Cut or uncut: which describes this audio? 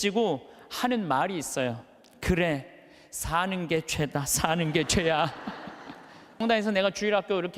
cut